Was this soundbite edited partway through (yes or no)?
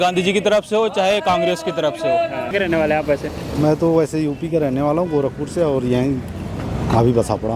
no